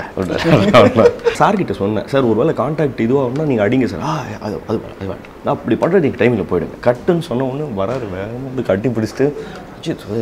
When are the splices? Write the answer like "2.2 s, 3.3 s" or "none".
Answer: 1.4 s, 6.7 s